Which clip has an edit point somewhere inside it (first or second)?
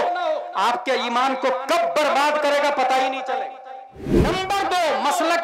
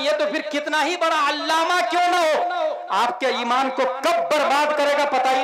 first